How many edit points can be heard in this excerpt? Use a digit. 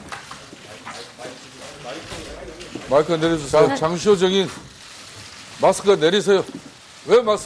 1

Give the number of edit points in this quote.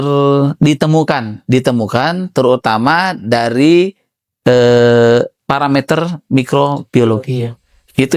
0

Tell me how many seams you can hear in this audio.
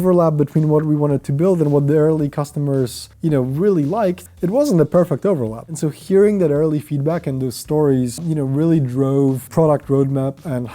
2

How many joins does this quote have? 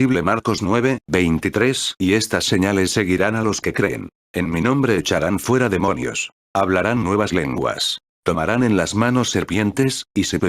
2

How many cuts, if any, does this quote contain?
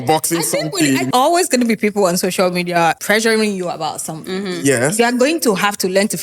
2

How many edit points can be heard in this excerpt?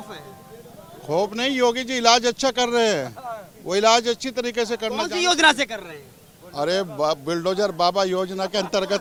0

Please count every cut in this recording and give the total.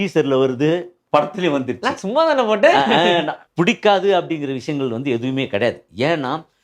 1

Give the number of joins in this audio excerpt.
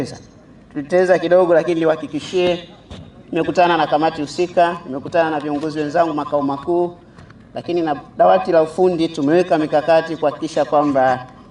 0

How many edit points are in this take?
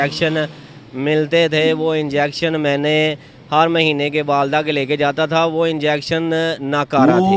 0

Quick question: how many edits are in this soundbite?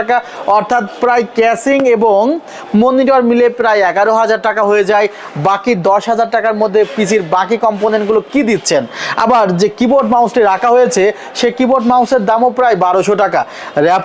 0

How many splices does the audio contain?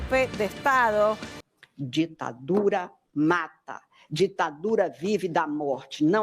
1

